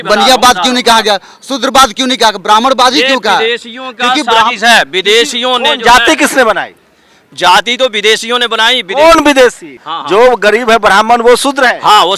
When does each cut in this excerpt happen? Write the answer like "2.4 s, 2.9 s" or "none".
9.9 s